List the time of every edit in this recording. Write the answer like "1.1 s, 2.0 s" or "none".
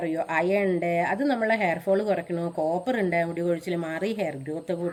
none